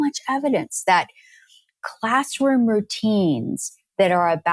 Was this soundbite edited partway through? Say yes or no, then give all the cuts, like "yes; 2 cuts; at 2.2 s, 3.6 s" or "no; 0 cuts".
no; 0 cuts